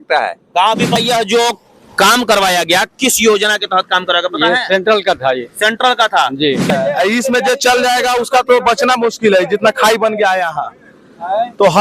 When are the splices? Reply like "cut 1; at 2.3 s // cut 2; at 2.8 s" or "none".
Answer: cut 1; at 0.9 s // cut 2; at 6.7 s